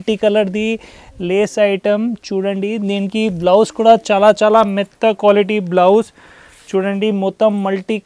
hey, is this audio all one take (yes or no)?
yes